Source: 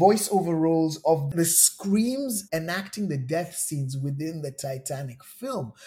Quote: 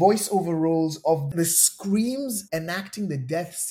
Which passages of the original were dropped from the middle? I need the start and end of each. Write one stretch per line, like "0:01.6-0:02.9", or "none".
none